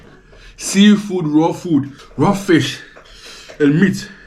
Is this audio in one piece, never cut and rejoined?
no; 1 cut; at 2.0 s

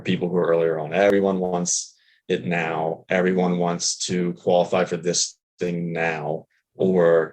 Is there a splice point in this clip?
yes; 1 cut; at 1.1 s

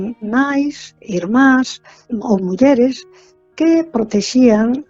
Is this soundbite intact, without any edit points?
no; 1 cut; at 2.0 s

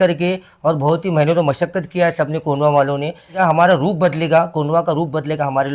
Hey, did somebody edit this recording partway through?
yes; 1 cut; at 3.3 s

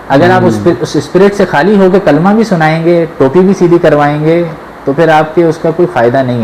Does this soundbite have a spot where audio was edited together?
no; 0 cuts

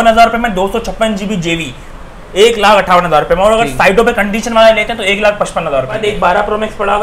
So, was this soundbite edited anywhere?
yes; 1 cut; at 6.0 s

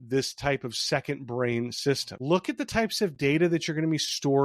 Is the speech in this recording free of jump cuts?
no; 1 cut; at 2.1 s

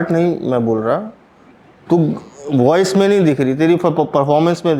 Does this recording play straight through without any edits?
yes; 0 cuts

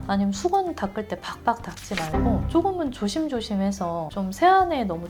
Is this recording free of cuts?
yes; 0 cuts

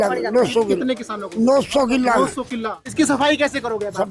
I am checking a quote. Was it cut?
yes; 1 cut; at 2.8 s

